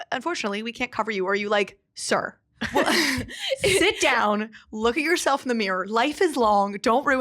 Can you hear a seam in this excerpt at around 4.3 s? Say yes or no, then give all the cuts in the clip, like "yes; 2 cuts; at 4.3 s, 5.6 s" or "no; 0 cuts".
no; 0 cuts